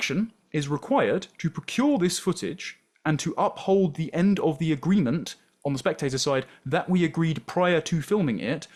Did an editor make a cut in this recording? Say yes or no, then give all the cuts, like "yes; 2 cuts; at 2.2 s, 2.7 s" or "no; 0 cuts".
no; 0 cuts